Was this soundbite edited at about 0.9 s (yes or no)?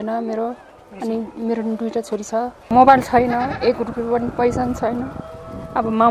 no